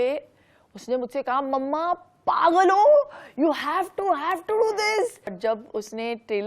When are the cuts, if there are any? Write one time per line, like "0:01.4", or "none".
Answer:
0:05.4